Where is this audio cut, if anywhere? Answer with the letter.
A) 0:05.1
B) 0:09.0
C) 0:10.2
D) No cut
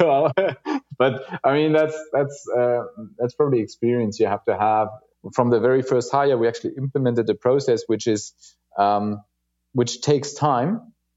A